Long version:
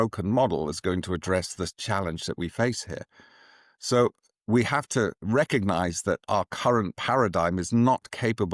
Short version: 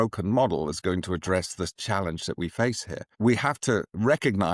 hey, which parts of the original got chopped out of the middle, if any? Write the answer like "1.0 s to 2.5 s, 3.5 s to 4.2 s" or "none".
3.0 s to 4.3 s